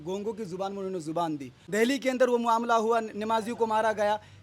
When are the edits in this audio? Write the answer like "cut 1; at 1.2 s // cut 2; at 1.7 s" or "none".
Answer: cut 1; at 1.6 s